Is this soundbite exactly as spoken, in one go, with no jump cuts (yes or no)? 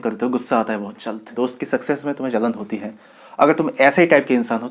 no